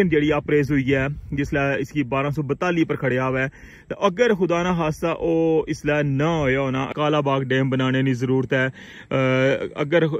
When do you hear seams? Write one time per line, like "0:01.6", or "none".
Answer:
0:06.9